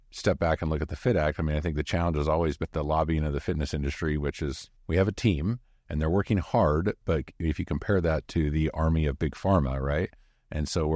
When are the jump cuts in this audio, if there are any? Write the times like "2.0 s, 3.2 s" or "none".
2.6 s, 4.7 s